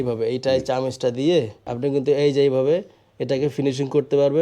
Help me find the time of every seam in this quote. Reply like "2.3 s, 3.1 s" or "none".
1.6 s